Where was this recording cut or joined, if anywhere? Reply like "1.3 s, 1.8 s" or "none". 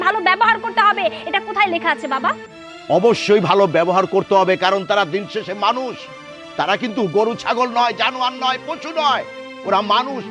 none